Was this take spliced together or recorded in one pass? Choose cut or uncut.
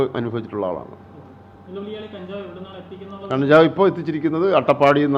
uncut